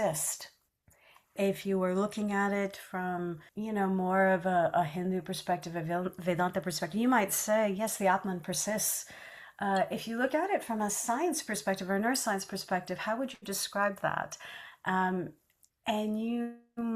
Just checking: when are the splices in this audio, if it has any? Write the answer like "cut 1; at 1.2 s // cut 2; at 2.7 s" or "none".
cut 1; at 1.3 s // cut 2; at 3.5 s